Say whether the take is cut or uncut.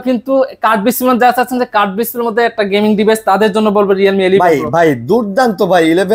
uncut